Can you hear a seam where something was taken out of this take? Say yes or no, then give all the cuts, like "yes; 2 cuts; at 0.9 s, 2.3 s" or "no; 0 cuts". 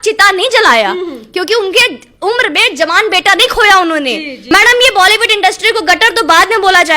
yes; 1 cut; at 4.5 s